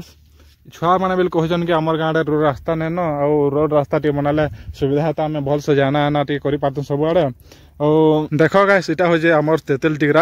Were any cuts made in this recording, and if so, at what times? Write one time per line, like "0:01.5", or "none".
0:08.3